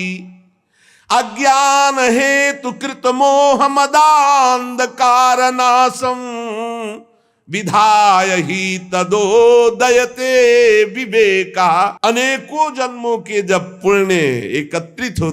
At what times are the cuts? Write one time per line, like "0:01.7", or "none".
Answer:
0:12.0